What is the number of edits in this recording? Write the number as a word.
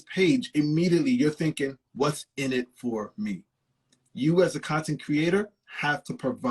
zero